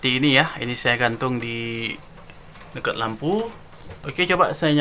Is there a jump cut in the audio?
no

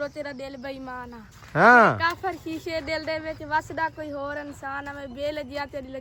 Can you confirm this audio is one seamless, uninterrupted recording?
yes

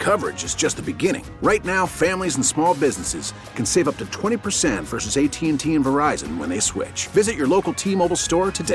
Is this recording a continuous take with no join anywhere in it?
yes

